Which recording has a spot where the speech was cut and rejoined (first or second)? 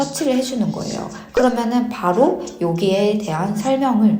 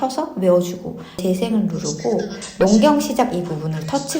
second